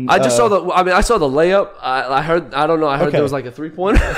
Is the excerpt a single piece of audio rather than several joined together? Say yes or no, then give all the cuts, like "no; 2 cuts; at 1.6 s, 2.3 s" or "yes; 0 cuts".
yes; 0 cuts